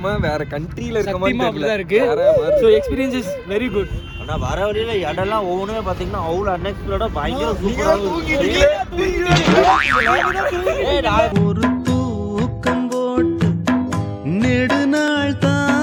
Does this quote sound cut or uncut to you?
uncut